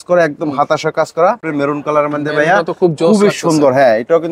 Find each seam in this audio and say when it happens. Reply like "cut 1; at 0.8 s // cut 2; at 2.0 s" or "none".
cut 1; at 1.5 s